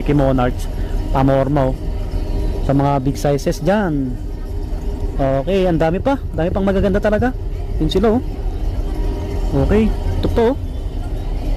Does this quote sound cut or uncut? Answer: uncut